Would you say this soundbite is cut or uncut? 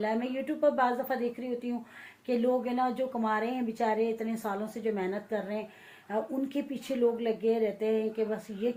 uncut